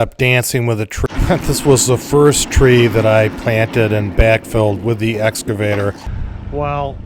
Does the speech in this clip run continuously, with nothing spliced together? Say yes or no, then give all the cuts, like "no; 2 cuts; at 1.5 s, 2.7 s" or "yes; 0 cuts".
no; 2 cuts; at 1.1 s, 6.1 s